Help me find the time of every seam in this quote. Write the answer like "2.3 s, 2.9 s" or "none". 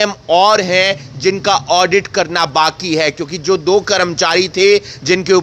none

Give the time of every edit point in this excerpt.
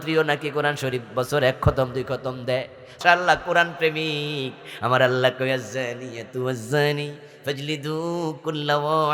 3.0 s

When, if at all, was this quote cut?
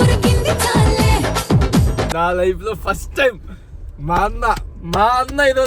2.1 s

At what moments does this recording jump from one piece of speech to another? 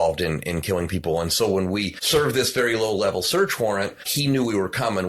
2.0 s, 4.1 s

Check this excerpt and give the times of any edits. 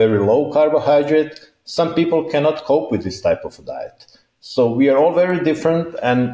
none

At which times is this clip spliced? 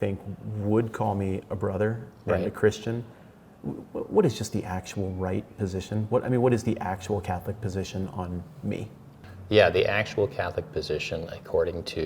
9.1 s

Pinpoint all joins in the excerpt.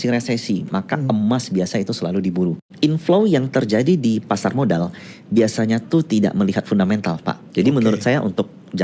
2.6 s, 7.4 s

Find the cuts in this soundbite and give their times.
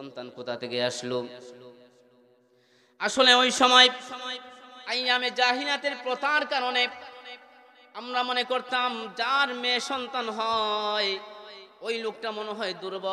none

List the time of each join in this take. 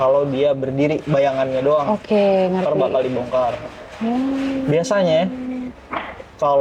none

